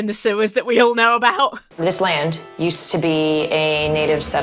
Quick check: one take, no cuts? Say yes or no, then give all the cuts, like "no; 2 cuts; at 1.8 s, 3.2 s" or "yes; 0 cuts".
no; 1 cut; at 1.6 s